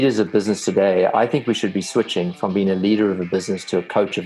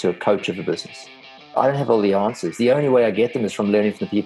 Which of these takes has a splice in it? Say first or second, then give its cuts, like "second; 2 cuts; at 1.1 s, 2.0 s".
second; 1 cut; at 1.5 s